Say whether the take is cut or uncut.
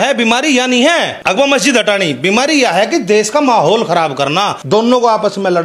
cut